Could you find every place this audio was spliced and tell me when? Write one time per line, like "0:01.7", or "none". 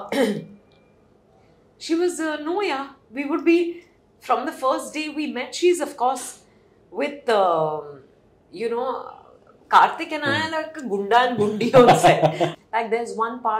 0:12.6